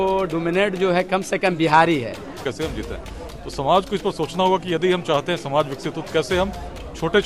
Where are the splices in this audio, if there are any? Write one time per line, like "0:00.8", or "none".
0:02.4